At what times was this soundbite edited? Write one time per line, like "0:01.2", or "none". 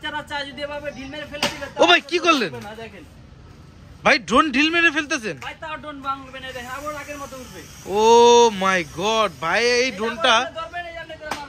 none

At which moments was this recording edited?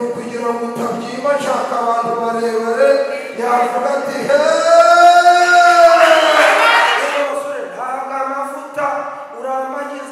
0:07.0

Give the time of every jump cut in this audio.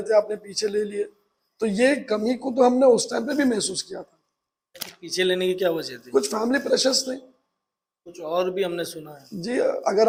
none

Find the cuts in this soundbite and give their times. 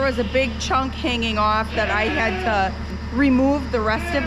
0:03.0

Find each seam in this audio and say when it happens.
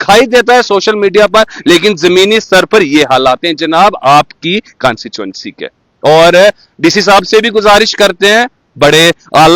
none

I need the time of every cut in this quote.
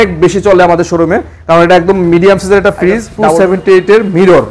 0:03.4

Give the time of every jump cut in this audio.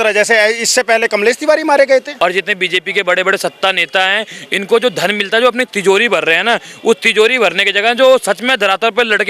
0:02.1

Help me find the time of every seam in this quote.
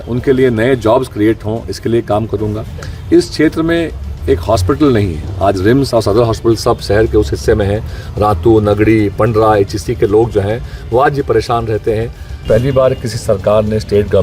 0:12.4

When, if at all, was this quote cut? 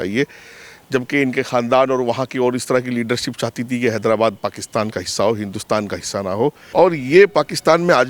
0:06.6

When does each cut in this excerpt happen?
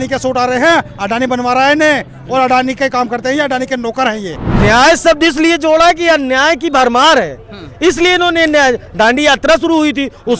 0:04.4

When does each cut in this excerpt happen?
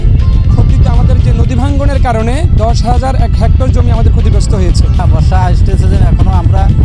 0:05.0

